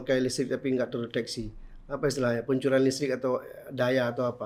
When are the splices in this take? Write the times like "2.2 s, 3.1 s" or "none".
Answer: none